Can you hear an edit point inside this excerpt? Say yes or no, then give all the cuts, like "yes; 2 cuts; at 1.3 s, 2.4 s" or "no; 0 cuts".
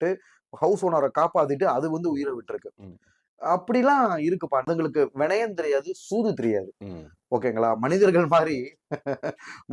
yes; 1 cut; at 4.7 s